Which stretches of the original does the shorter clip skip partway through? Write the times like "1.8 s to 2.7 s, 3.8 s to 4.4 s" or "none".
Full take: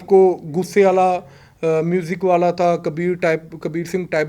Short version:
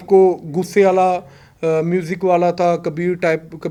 none